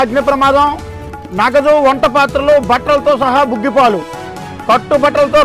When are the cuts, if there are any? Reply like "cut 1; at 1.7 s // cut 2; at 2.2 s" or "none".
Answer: none

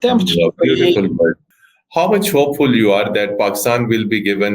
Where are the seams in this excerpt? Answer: cut 1; at 1.5 s

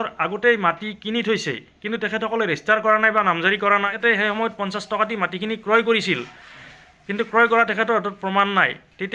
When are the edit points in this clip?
cut 1; at 3.9 s

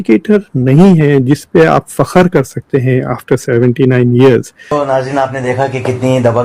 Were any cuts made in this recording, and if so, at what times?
cut 1; at 4.7 s

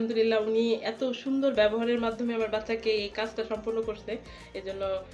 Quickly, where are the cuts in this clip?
none

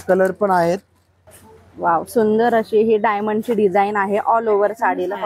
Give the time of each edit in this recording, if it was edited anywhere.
cut 1; at 1.3 s

